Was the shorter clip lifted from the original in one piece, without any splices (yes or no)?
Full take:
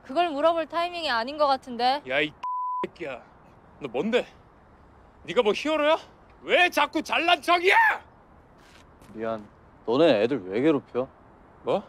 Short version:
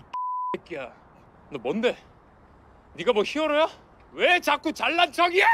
yes